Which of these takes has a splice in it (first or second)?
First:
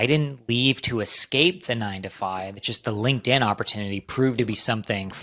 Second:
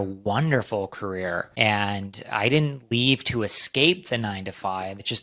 second